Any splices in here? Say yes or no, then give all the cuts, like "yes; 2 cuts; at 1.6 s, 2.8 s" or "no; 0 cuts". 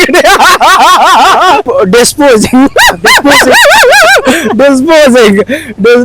yes; 1 cut; at 1.7 s